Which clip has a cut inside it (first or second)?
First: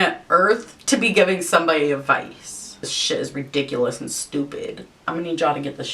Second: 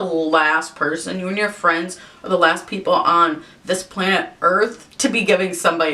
first